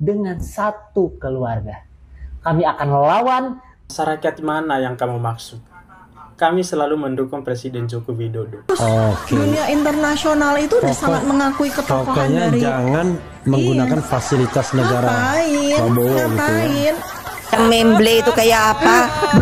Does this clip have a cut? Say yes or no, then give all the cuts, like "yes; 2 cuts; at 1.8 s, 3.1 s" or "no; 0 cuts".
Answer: yes; 4 cuts; at 2.3 s, 8.7 s, 15.2 s, 17.6 s